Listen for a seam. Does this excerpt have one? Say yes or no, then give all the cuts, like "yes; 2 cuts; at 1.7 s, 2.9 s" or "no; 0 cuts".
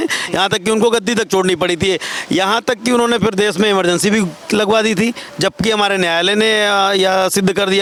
no; 0 cuts